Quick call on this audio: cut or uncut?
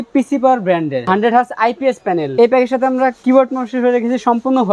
cut